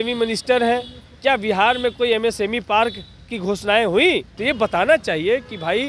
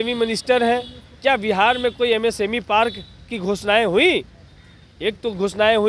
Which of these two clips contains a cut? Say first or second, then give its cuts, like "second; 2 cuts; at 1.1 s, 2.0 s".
first; 1 cut; at 4.3 s